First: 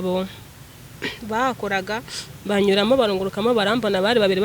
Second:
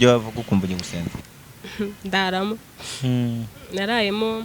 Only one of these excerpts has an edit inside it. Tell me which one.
second; 1 cut; at 1.1 s

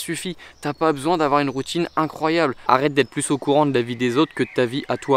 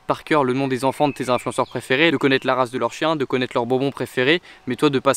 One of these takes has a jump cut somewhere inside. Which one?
first; 1 cut; at 2.6 s

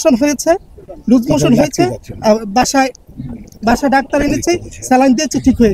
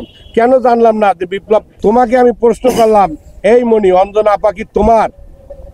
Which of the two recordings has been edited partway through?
second; 1 cut; at 1.7 s

